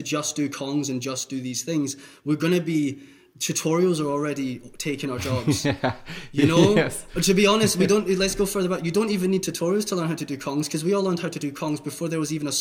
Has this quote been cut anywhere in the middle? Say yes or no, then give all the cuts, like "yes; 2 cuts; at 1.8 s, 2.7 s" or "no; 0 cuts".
no; 0 cuts